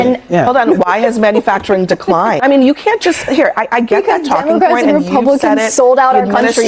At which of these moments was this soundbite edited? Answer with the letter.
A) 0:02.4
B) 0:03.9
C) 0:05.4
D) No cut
A